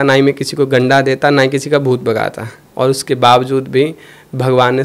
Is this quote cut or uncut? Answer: cut